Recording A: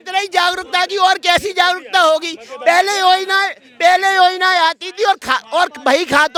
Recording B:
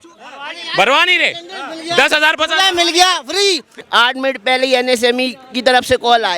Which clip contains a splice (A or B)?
B